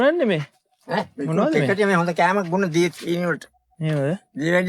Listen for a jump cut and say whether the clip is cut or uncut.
uncut